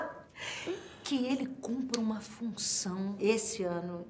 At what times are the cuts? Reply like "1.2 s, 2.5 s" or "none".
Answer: 3.2 s